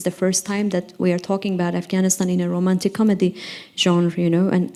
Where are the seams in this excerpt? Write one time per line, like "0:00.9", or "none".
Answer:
none